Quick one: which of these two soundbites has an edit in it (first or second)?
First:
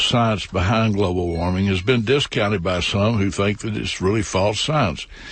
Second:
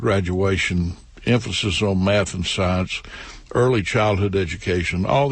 second